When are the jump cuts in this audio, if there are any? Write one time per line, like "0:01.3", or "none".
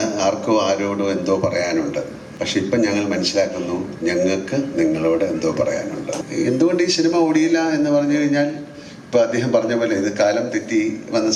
0:02.2
0:06.2